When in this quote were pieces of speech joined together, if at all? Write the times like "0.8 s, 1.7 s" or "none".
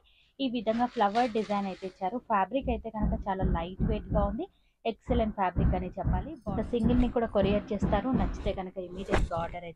6.3 s